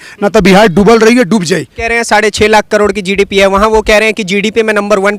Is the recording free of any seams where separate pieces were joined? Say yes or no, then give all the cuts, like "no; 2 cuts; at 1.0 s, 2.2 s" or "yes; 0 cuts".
no; 1 cut; at 1.8 s